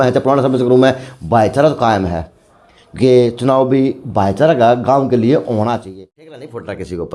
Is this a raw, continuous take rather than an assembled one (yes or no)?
no